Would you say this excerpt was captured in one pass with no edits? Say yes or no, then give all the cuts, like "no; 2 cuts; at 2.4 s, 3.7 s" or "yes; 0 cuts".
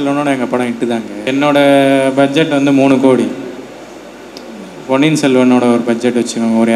no; 1 cut; at 1.3 s